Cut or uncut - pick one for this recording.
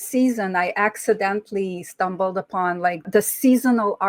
cut